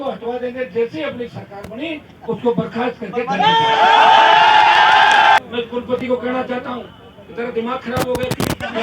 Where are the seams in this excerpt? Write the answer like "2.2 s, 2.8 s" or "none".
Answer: 5.4 s